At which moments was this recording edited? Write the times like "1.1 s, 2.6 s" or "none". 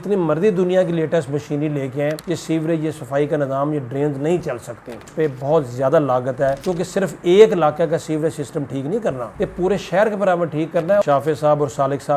5.0 s, 11.0 s